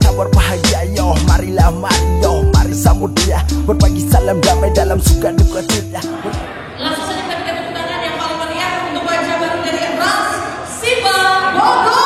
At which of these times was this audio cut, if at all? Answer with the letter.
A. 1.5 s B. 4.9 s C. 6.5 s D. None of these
D